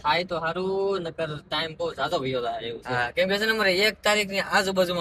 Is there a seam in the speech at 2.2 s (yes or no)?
no